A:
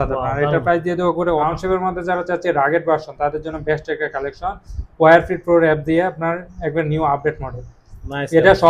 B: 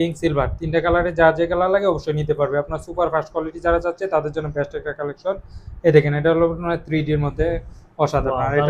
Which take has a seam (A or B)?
A